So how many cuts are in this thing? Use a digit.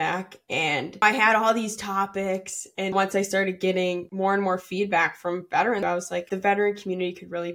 4